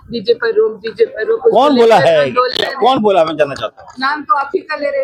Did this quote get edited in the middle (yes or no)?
no